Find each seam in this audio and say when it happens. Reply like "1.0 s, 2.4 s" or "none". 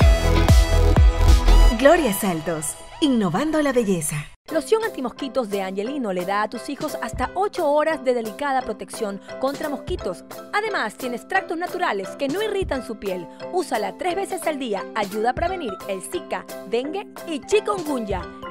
4.2 s